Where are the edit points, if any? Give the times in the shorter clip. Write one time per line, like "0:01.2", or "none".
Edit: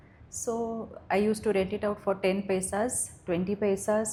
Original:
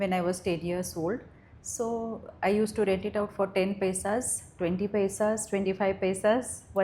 none